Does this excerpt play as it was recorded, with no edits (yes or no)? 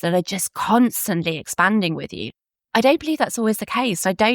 no